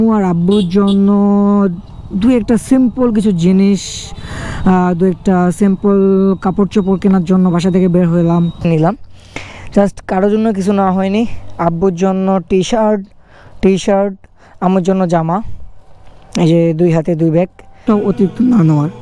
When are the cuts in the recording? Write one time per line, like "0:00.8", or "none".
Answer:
0:08.7
0:17.8

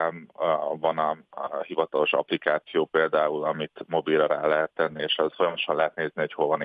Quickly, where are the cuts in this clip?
0:05.3

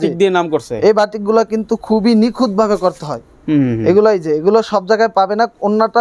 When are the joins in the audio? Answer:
none

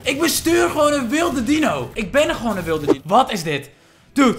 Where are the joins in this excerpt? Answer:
0:02.9

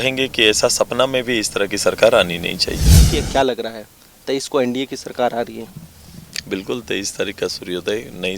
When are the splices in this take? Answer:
0:03.1

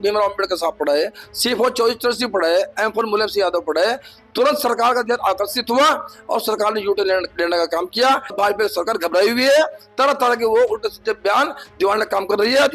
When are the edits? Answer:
0:08.3

